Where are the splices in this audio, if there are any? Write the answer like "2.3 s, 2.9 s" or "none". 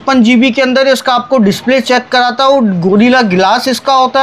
none